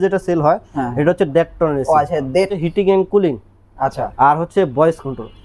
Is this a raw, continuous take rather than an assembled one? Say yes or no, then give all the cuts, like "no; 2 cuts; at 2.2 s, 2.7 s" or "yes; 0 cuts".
no; 1 cut; at 2.5 s